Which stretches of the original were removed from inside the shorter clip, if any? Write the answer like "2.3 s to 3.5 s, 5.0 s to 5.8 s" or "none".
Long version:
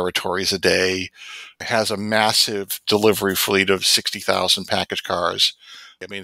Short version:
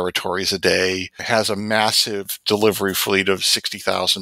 1.1 s to 1.5 s